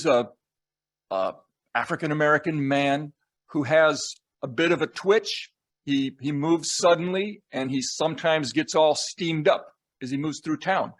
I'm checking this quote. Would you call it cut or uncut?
uncut